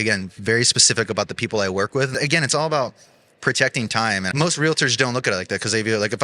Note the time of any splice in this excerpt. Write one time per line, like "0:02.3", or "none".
0:02.1
0:04.3